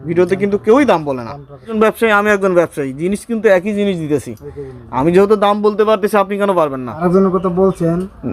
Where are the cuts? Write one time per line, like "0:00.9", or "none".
0:01.7
0:07.0